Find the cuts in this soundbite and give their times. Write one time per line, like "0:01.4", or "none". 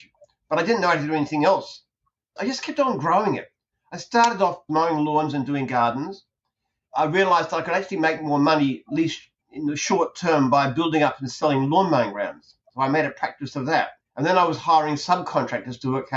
0:14.0